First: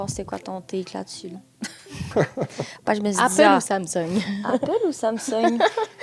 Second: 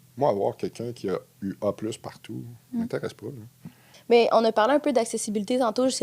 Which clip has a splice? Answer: second; 1 cut; at 3.9 s

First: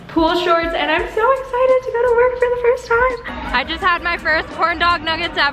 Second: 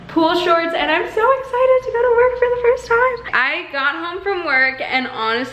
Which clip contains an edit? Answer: first; 1 cut; at 3.3 s

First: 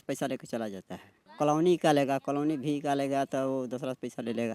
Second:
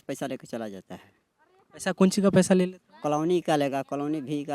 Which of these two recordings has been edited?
first; 1 cut; at 1.2 s

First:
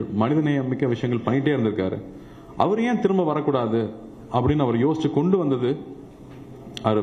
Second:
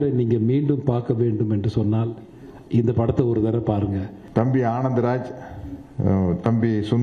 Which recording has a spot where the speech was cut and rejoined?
second; 1 cut; at 4.2 s

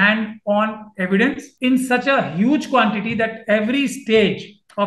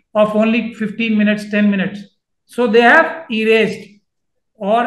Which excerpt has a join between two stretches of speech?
first; 1 cut; at 1.5 s

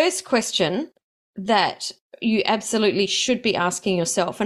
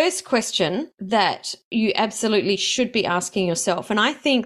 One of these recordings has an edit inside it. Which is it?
second; 1 cut; at 1.3 s

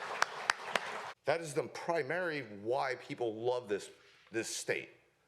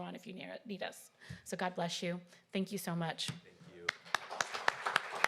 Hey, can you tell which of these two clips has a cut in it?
first; 1 cut; at 1.1 s

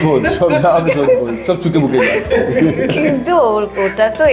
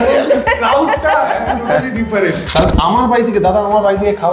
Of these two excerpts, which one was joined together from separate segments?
second; 1 cut; at 2.4 s

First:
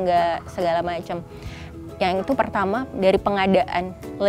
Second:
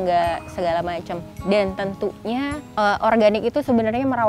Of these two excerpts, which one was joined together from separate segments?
second; 2 cuts; at 1.3 s, 2.6 s

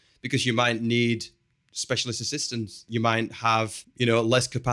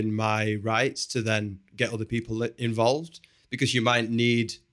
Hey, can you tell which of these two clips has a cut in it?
first; 2 cuts; at 2.9 s, 3.8 s

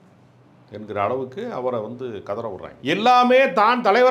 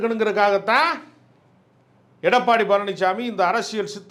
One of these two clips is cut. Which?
first; 1 cut; at 2.7 s

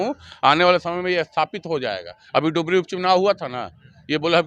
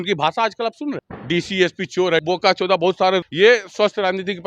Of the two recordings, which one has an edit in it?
second; 3 cuts; at 1.1 s, 2.2 s, 3.3 s

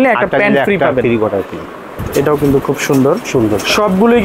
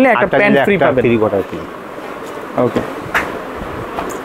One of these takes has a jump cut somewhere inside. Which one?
first; 1 cut; at 2.0 s

